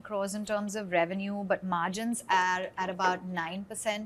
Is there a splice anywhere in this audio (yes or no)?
no